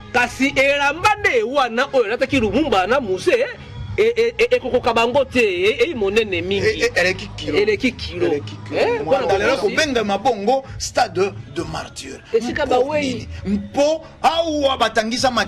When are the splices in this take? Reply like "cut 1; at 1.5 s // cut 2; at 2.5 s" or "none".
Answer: cut 1; at 9.3 s